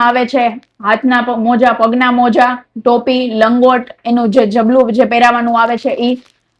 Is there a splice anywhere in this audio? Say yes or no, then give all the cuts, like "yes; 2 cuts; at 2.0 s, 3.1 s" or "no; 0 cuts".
no; 0 cuts